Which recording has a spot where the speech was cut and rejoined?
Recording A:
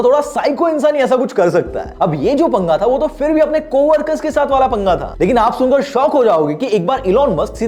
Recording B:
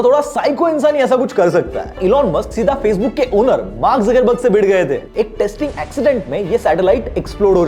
B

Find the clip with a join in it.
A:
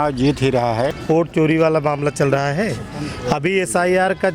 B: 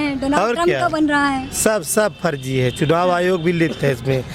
A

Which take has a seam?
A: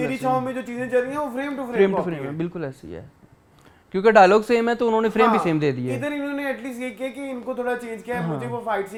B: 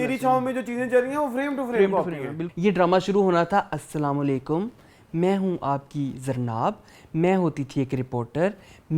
B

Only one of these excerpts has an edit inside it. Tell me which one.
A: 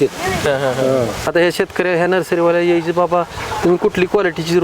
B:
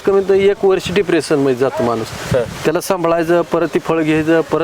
A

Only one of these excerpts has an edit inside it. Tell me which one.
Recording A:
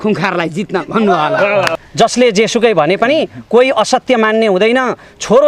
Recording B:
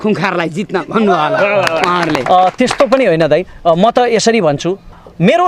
A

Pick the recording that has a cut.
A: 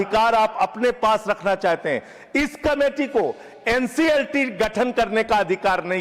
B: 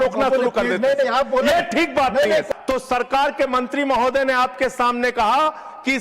B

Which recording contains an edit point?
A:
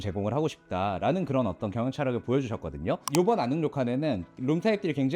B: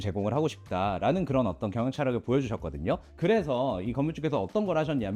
A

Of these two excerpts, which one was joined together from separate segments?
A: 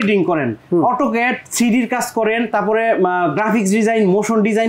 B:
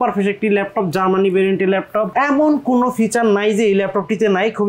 B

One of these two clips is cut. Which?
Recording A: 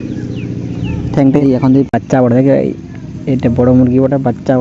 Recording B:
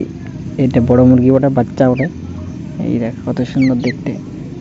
A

